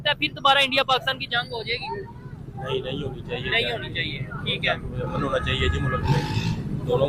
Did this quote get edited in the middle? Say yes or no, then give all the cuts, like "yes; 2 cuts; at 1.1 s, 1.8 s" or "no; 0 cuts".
no; 0 cuts